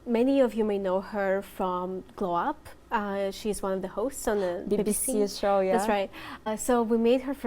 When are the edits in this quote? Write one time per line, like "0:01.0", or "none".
0:06.4

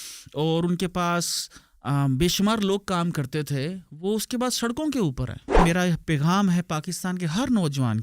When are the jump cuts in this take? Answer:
0:05.6

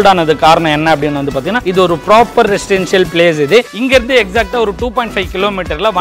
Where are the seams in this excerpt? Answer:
0:01.6
0:03.7

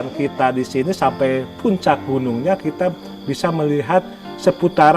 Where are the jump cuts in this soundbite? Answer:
none

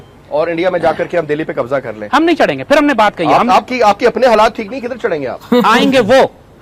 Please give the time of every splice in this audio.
none

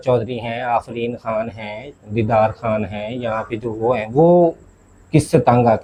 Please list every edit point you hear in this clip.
none

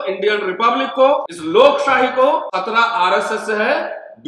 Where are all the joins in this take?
0:01.3
0:02.5

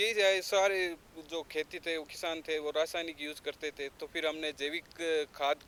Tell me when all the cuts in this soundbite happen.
none

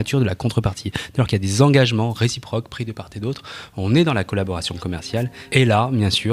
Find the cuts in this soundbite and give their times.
0:05.4

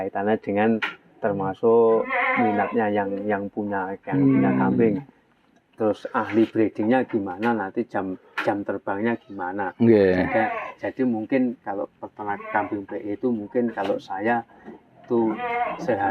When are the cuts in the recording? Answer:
none

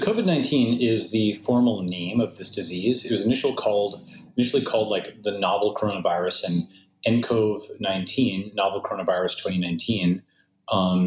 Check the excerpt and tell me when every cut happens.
none

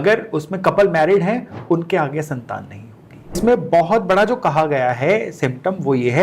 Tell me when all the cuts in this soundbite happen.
0:03.4

